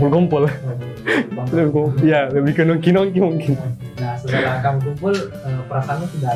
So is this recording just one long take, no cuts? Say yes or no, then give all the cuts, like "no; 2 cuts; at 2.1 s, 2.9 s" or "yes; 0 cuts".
yes; 0 cuts